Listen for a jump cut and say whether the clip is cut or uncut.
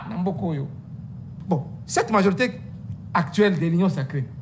cut